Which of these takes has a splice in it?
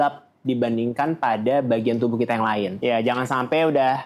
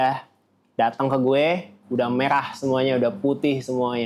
first; 1 cut; at 2.7 s

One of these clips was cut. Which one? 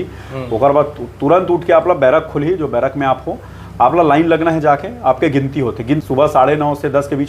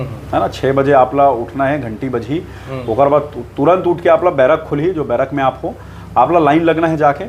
first; 1 cut; at 6.0 s

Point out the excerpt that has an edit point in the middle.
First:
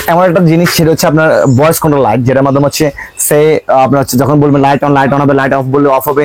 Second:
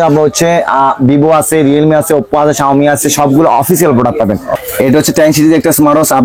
second; 1 cut; at 4.5 s

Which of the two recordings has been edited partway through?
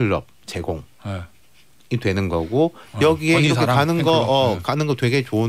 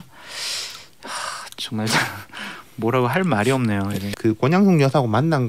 second; 1 cut; at 4.1 s

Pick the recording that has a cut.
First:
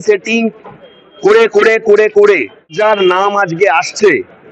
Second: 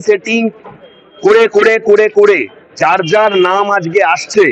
first; 1 cut; at 2.7 s

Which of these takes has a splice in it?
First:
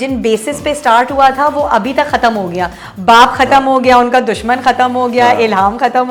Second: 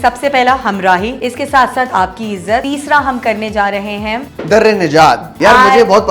second; 4 cuts; at 1.1 s, 2.6 s, 4.3 s, 5.3 s

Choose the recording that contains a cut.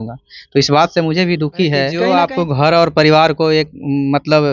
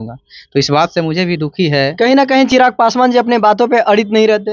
first; 1 cut; at 2.0 s

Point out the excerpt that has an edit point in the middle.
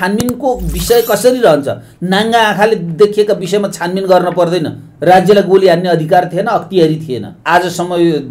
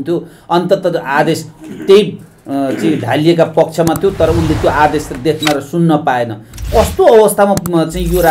first; 1 cut; at 7.3 s

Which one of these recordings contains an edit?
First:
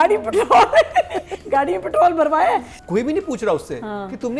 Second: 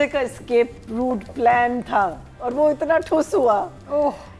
first; 1 cut; at 2.8 s

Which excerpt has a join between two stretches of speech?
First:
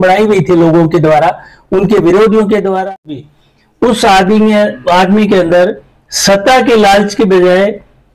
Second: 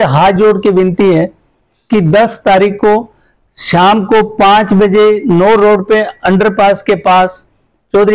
first; 1 cut; at 3.3 s

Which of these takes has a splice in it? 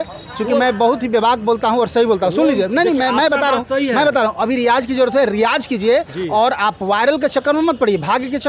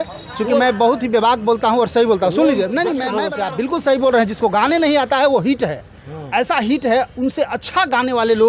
second; 1 cut; at 3.2 s

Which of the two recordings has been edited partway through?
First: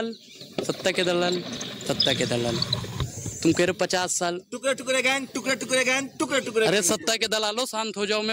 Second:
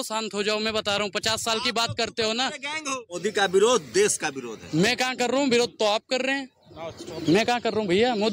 second; 1 cut; at 3.2 s

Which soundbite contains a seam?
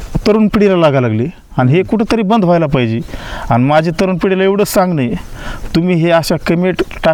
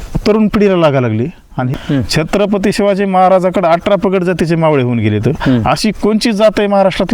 second; 1 cut; at 1.7 s

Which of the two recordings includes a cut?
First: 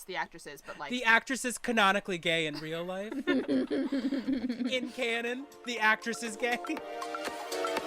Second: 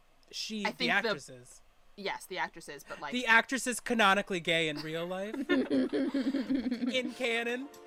first; 1 cut; at 6.8 s

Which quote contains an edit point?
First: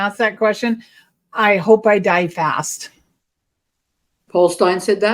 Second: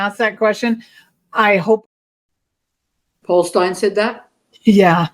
second; 1 cut; at 1.8 s

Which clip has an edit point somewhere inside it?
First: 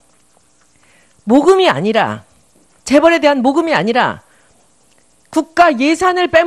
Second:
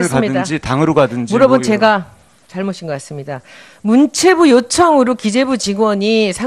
first; 1 cut; at 3.1 s

